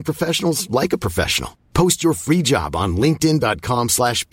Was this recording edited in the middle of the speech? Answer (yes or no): no